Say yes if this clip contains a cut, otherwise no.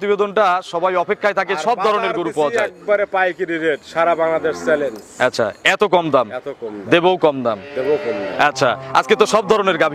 no